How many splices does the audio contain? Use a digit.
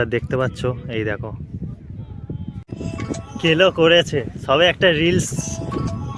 1